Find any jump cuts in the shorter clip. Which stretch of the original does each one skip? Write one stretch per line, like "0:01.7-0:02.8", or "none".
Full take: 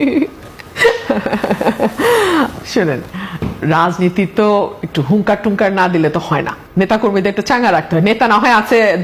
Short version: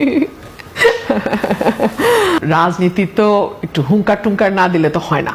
0:02.4-0:03.6